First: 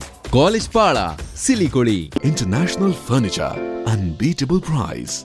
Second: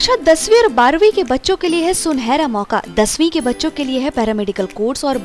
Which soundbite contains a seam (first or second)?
first